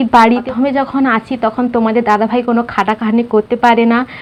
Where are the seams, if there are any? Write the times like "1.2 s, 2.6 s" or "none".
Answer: none